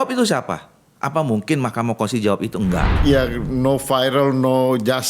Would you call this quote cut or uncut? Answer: cut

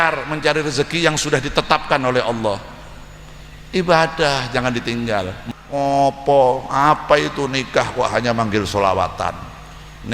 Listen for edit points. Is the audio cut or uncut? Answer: cut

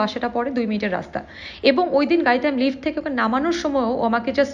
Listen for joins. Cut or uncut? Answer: uncut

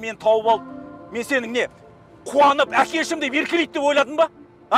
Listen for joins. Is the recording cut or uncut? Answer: uncut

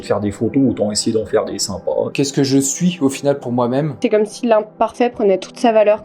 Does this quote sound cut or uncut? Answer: cut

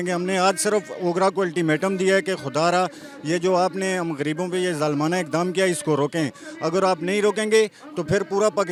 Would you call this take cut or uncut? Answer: uncut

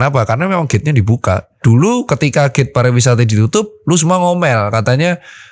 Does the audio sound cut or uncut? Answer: cut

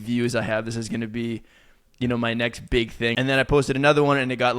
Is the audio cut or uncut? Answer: cut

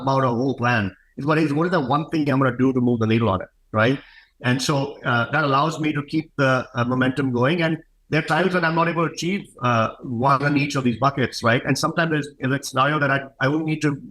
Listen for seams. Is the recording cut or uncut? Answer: uncut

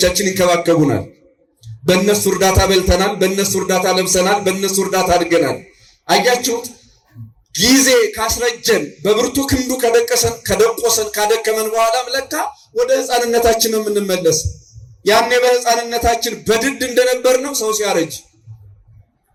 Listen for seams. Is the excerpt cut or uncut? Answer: uncut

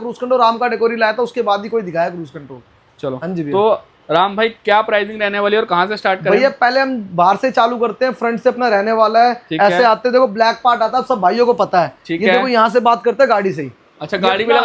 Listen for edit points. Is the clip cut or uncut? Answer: uncut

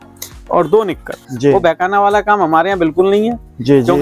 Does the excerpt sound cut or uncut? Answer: cut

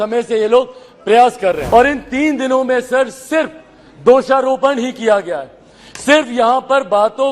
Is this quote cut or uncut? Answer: cut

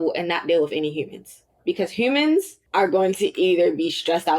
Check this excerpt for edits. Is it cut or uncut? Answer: cut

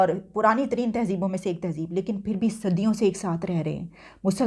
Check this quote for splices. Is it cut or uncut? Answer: uncut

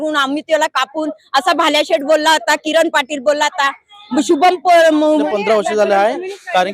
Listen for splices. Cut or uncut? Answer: cut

